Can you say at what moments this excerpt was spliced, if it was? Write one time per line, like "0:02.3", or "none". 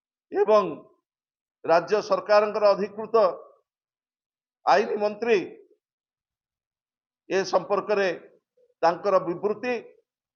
none